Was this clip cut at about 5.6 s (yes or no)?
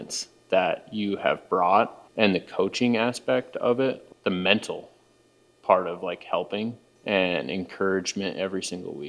no